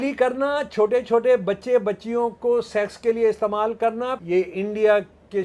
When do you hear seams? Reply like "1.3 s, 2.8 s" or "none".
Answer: 4.2 s